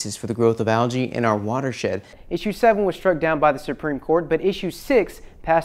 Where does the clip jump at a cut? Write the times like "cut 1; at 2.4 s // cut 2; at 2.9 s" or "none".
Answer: cut 1; at 2.1 s